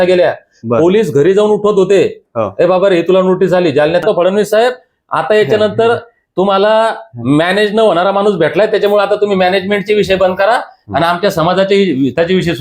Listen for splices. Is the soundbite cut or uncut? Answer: cut